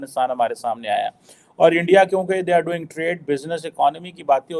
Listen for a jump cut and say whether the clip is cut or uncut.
uncut